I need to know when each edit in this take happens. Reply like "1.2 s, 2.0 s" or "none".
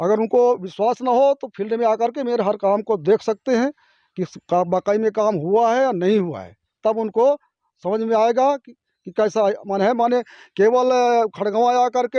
none